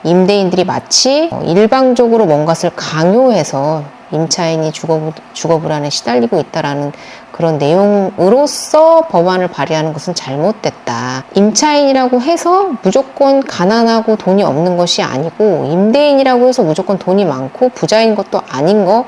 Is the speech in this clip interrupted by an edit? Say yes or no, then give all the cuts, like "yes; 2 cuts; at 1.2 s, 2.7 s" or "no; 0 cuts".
no; 0 cuts